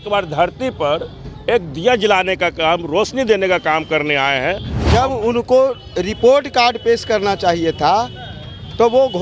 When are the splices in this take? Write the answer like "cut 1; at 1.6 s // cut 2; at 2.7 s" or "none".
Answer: cut 1; at 4.7 s